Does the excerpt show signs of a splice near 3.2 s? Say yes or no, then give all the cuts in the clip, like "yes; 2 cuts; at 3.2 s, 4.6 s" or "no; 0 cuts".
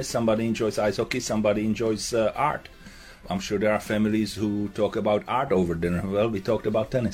yes; 1 cut; at 3.2 s